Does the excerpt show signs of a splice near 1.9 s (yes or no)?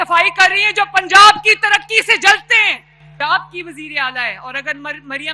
no